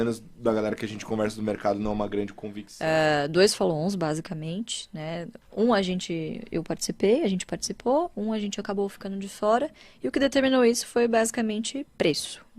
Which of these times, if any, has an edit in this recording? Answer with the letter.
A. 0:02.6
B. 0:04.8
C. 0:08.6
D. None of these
A